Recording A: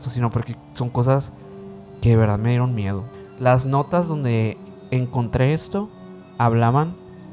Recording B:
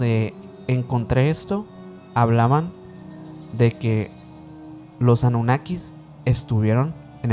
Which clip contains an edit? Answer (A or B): A